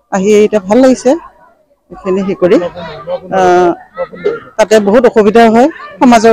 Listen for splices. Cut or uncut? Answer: uncut